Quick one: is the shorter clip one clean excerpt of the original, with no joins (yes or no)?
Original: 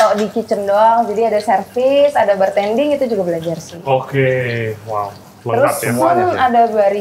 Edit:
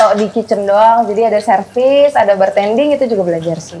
yes